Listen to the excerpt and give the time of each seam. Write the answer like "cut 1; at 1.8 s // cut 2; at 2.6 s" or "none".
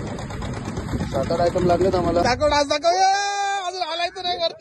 cut 1; at 2.2 s